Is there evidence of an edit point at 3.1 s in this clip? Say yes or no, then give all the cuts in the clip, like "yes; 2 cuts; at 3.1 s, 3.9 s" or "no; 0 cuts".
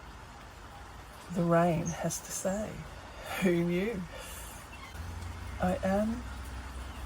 no; 1 cut; at 4.9 s